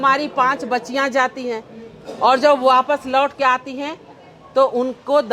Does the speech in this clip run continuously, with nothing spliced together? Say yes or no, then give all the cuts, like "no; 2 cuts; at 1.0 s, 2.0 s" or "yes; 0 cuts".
yes; 0 cuts